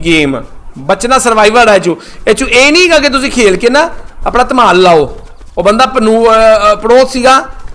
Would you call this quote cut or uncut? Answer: uncut